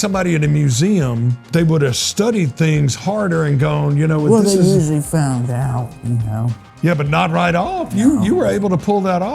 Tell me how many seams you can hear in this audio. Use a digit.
1